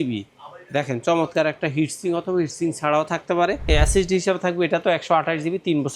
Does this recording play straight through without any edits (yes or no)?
no